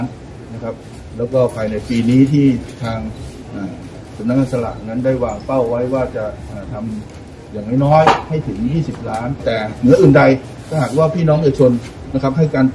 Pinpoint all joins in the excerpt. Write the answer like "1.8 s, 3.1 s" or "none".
9.4 s